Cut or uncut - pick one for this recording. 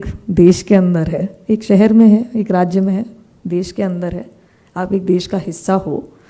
uncut